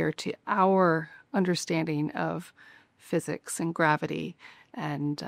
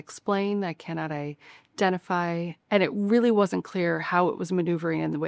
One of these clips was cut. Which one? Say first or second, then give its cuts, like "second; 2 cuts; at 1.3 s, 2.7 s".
second; 1 cut; at 2.5 s